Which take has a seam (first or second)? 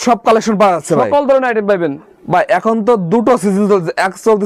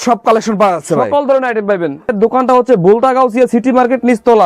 second